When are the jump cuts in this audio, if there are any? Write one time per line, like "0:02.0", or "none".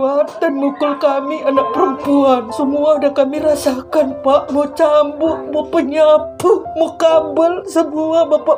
none